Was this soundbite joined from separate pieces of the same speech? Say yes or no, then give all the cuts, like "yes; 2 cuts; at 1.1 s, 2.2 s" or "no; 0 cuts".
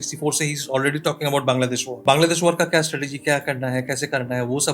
yes; 1 cut; at 1.9 s